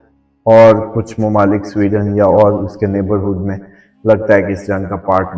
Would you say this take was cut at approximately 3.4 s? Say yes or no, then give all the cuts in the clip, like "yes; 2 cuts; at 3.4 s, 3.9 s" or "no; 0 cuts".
no; 0 cuts